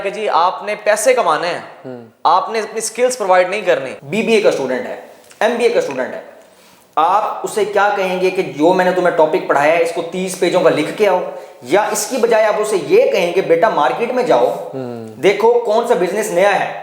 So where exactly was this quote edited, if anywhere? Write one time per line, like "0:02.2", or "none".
0:04.0